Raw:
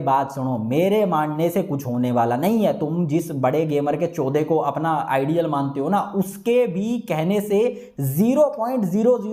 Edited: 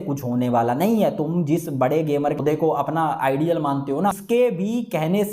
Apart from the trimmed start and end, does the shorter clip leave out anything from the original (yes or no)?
yes